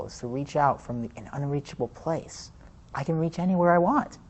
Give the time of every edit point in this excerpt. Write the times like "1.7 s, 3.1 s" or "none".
none